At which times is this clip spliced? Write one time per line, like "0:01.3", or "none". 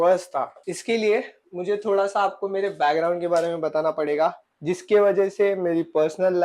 0:04.5